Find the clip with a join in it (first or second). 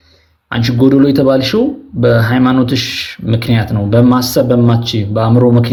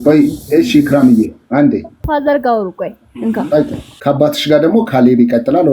second